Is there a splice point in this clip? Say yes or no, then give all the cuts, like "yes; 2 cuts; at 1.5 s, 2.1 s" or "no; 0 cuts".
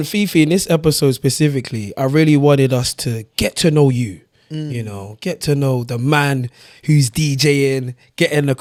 no; 0 cuts